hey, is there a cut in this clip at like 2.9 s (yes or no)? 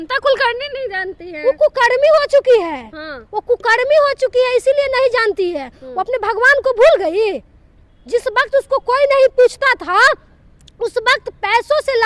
no